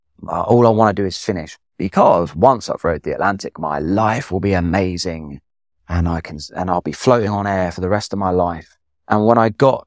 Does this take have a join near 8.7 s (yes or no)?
yes